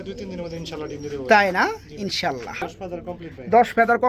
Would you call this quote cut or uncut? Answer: cut